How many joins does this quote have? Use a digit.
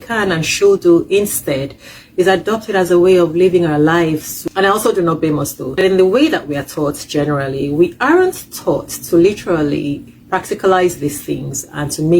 2